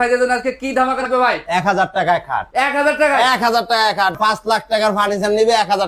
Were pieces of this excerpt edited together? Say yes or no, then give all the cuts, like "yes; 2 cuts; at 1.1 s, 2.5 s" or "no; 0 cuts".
yes; 2 cuts; at 1.0 s, 4.2 s